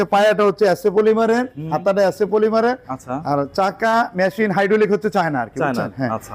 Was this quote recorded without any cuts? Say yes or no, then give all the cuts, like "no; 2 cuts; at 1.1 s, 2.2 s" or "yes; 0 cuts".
yes; 0 cuts